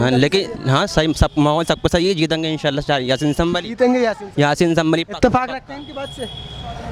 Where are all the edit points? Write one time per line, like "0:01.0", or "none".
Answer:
none